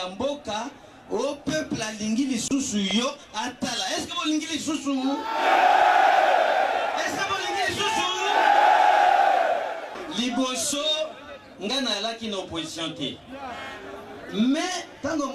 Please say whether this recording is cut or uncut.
uncut